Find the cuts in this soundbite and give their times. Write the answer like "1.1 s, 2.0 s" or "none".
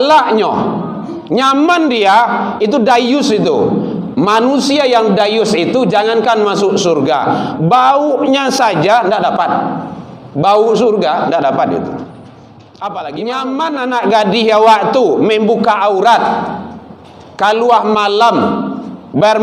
13.2 s